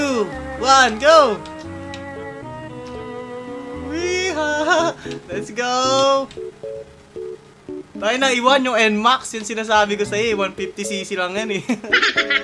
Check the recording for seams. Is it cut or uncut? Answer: uncut